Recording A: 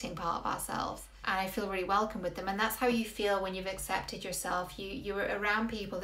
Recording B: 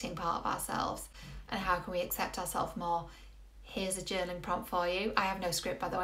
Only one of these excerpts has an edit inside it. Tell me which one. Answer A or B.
A